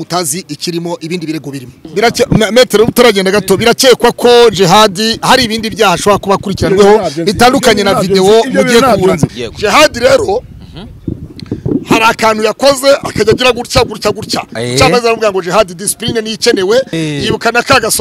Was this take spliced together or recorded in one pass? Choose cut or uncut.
cut